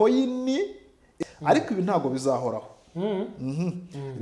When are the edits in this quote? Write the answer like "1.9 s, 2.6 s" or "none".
1.1 s